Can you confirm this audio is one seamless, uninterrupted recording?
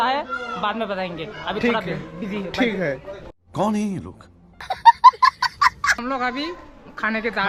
yes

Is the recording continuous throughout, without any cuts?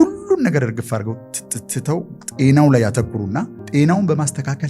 no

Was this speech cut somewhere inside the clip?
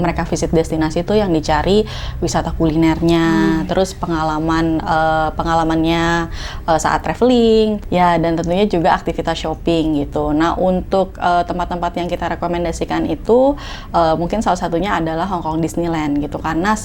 no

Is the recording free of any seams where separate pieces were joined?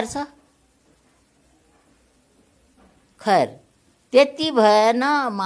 yes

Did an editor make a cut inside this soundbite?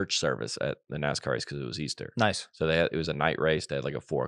no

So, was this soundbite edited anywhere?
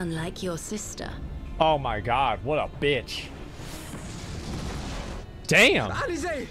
yes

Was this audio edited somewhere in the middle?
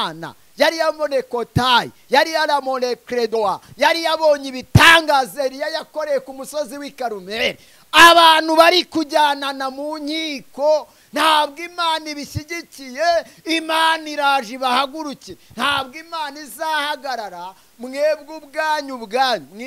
no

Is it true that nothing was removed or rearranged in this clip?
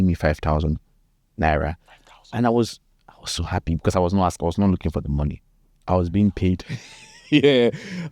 yes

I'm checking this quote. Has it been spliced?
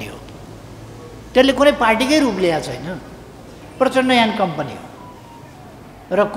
no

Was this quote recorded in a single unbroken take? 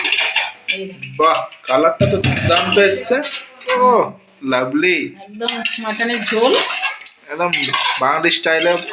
yes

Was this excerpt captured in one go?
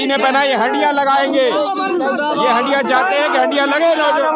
yes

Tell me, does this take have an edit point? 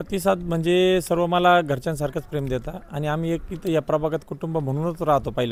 no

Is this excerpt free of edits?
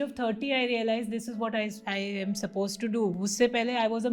yes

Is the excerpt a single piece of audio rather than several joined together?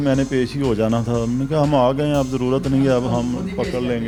yes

